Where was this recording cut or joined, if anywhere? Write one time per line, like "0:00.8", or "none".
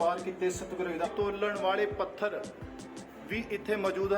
0:01.0